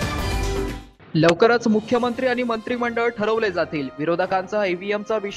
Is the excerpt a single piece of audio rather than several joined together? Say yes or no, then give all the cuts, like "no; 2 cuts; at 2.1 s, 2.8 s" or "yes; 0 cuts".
yes; 0 cuts